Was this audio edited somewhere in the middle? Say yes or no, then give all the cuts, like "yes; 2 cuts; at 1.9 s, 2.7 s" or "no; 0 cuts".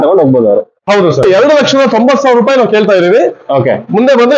yes; 1 cut; at 1.2 s